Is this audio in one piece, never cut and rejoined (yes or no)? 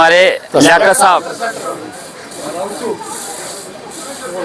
no